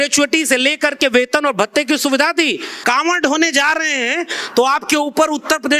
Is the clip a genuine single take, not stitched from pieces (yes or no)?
no